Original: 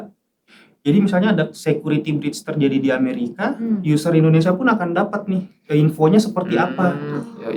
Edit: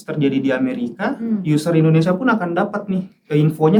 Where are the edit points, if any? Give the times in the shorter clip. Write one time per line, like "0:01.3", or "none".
none